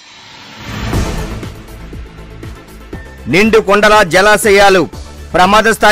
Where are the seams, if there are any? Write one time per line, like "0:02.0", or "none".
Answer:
0:03.2